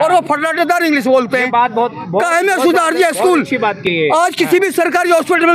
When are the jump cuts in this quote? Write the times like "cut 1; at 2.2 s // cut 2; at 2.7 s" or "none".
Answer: none